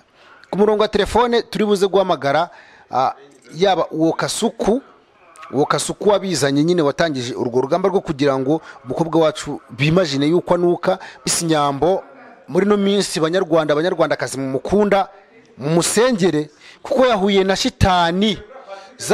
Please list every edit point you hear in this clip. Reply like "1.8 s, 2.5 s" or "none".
11.3 s

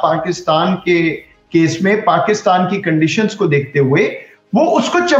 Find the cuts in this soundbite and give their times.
none

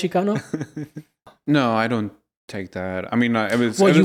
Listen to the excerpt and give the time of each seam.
1.2 s

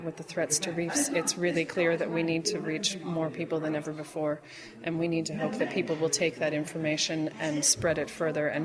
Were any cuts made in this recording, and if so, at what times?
none

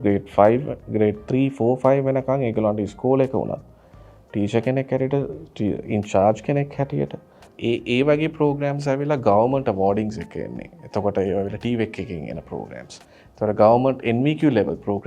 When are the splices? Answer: 7.5 s

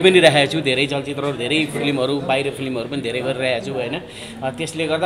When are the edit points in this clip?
none

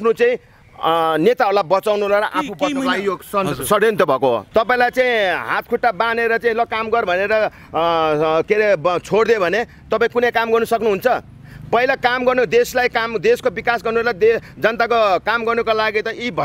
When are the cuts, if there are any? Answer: 4.5 s

